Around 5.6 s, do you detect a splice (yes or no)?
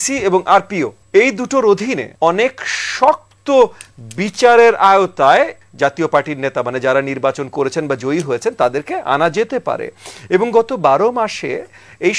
yes